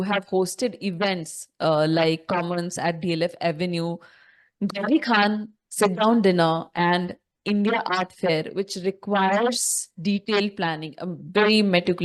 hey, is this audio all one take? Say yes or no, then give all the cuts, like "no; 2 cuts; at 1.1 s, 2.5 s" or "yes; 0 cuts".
yes; 0 cuts